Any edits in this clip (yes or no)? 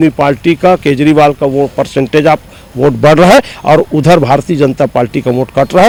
no